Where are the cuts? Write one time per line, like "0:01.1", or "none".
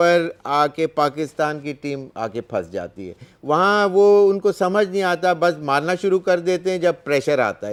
none

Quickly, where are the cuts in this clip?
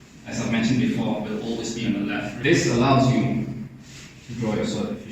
0:02.3

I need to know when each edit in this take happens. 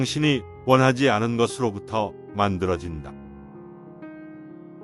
0:03.5

